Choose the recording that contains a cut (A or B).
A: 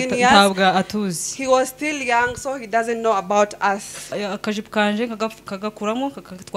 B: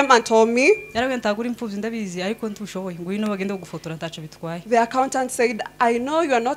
A